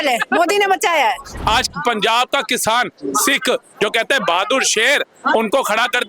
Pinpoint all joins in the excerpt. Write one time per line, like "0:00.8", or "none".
0:01.3